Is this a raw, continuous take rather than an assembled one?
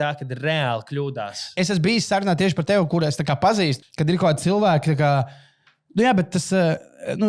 no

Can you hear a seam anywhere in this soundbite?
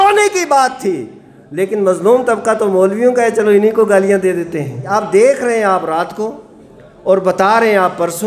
yes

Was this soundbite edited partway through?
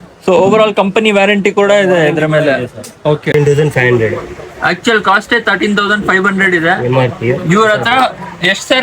yes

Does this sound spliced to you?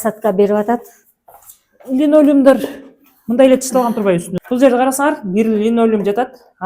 yes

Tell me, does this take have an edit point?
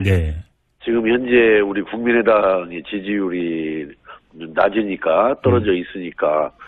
yes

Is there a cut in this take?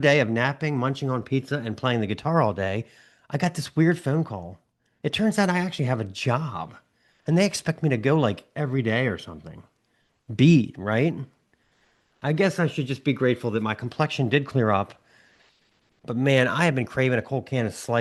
no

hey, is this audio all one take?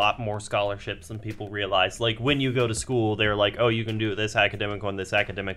yes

